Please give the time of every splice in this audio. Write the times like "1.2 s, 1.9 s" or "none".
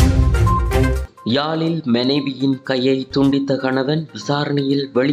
1.1 s